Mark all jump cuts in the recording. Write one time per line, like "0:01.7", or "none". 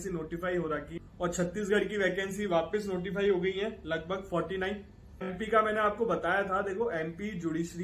0:01.0
0:05.3